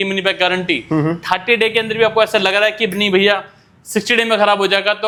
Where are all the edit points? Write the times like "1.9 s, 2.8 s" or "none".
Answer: none